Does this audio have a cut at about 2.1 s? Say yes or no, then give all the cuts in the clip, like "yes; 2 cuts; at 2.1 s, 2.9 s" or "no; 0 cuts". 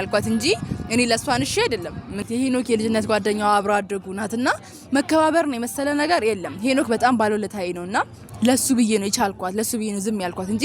yes; 1 cut; at 2.1 s